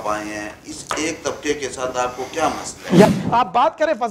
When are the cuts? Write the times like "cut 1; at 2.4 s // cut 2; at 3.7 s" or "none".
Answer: cut 1; at 3.1 s